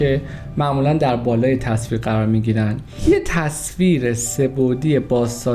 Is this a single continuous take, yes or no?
no